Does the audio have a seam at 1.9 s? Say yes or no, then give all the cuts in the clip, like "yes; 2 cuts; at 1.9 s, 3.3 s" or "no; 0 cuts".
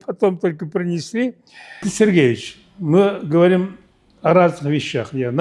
yes; 1 cut; at 1.9 s